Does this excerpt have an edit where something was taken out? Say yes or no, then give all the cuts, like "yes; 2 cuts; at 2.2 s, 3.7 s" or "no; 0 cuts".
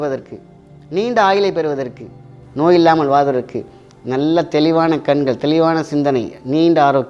no; 0 cuts